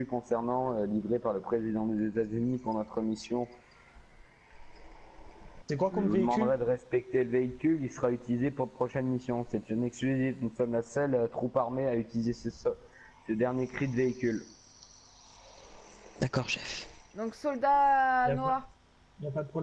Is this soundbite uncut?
yes; 0 cuts

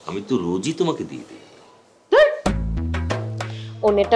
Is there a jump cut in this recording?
yes; 1 cut; at 3.2 s

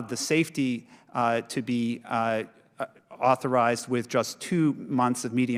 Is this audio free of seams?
yes; 0 cuts

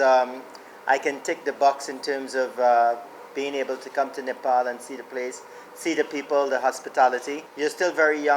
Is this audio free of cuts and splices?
no; 1 cut; at 7.4 s

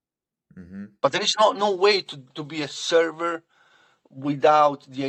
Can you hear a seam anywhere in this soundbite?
no; 0 cuts

